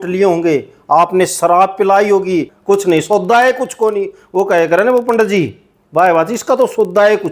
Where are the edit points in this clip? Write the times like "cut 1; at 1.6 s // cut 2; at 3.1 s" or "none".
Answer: cut 1; at 2.5 s